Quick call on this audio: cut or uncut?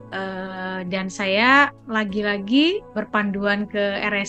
cut